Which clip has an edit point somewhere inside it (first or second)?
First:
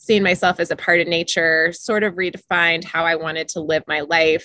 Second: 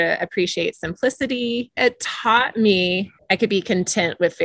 second